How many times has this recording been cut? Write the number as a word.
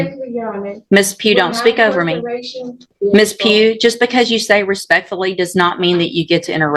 one